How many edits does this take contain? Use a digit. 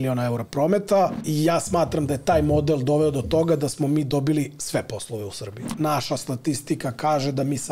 2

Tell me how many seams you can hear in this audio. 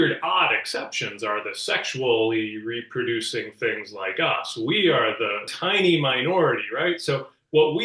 1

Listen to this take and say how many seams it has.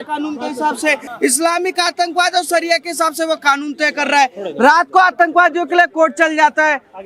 1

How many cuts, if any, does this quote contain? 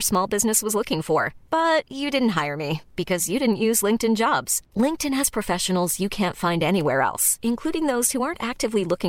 0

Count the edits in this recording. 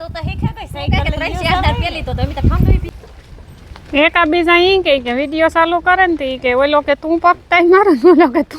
1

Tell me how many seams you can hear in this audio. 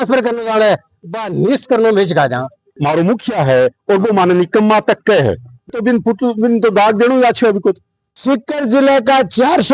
1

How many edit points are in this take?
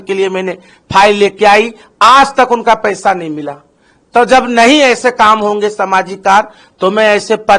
0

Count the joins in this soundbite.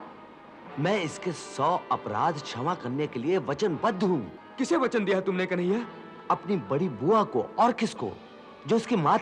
1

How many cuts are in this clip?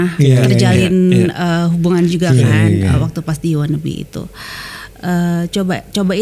0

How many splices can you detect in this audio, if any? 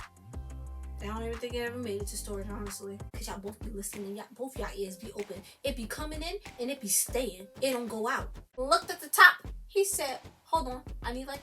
2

